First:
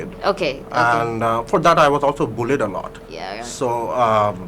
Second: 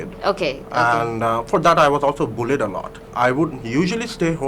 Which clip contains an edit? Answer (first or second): second